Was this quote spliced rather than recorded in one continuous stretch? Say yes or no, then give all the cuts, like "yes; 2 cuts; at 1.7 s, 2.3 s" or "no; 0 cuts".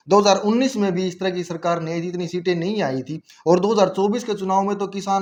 no; 0 cuts